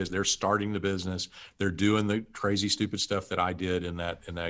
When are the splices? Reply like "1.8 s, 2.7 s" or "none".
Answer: none